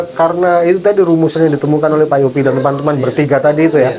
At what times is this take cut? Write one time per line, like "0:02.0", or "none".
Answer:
none